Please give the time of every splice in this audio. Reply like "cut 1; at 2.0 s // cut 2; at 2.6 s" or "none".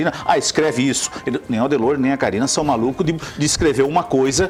none

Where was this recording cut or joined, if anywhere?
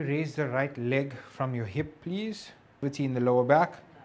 cut 1; at 2.8 s

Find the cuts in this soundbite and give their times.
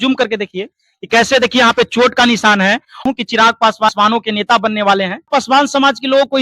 cut 1; at 3.0 s // cut 2; at 3.9 s // cut 3; at 5.3 s

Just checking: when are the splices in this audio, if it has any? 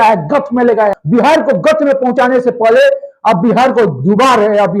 cut 1; at 0.9 s

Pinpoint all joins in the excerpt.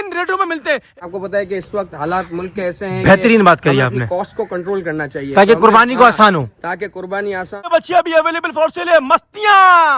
cut 1; at 0.9 s // cut 2; at 7.7 s

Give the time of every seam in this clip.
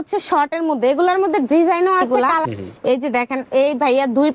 cut 1; at 2.2 s

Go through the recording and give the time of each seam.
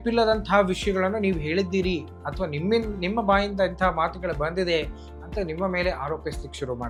none

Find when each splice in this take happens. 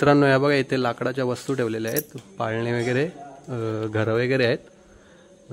none

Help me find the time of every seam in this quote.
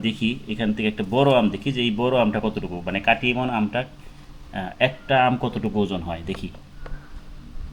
none

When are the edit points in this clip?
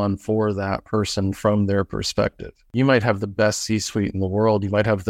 cut 1; at 2.7 s

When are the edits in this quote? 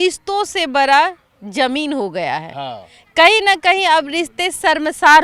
none

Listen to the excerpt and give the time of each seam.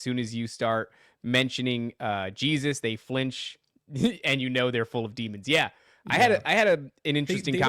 none

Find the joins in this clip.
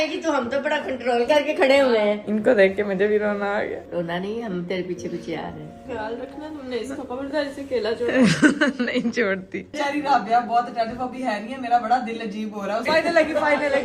cut 1; at 2.2 s // cut 2; at 5.8 s // cut 3; at 9.7 s // cut 4; at 12.8 s

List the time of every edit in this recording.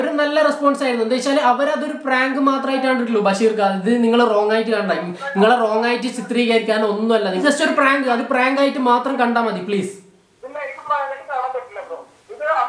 cut 1; at 7.4 s

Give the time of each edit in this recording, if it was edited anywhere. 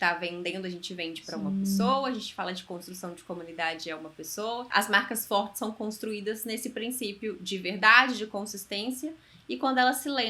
cut 1; at 4.7 s

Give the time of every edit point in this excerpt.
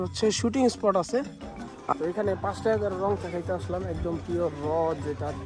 cut 1; at 1.7 s

